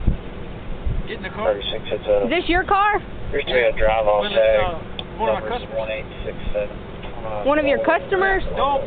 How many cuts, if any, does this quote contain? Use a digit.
0